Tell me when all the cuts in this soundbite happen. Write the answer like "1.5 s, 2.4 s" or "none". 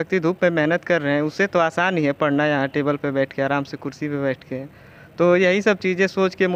none